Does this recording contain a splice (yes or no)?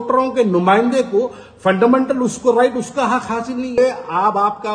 yes